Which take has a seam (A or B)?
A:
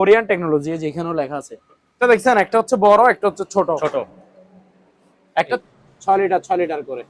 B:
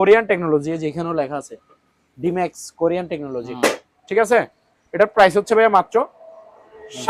A